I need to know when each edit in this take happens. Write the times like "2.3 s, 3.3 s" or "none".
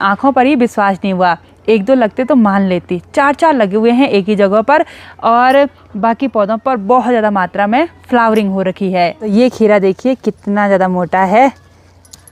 none